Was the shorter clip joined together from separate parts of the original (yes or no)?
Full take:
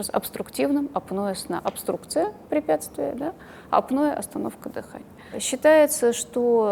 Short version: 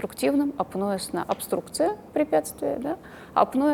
no